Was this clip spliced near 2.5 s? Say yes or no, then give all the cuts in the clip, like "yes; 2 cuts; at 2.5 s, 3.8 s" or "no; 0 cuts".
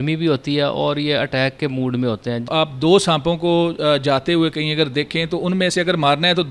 yes; 1 cut; at 2.5 s